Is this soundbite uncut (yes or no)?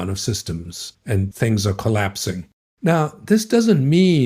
no